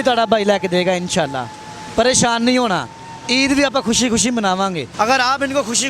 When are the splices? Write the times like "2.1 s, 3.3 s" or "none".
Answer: 4.8 s